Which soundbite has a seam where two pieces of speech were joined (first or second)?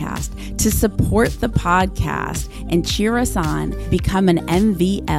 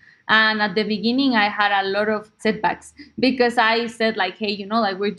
second